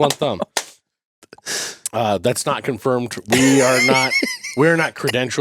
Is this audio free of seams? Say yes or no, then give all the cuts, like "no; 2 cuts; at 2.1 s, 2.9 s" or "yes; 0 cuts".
yes; 0 cuts